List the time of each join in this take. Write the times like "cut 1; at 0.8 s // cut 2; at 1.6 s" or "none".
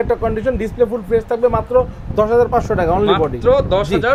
none